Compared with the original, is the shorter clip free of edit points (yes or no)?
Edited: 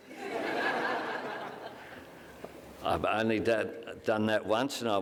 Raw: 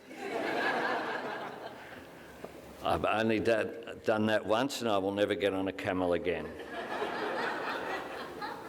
yes